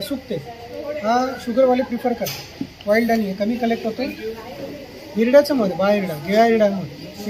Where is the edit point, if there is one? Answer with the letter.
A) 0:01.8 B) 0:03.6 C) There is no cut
C